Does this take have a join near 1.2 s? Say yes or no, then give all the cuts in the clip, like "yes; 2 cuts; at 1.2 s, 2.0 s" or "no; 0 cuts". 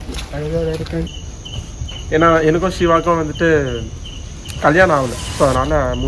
yes; 1 cut; at 1.2 s